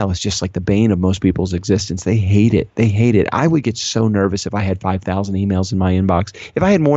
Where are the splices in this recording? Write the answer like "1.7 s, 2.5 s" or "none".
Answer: none